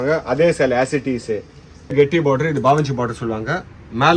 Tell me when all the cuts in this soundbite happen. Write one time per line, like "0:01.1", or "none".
0:01.9